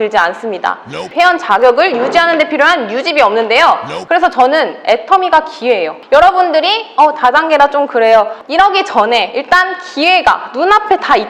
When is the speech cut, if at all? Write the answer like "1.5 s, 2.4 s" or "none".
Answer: 1.0 s, 3.9 s, 5.9 s, 8.4 s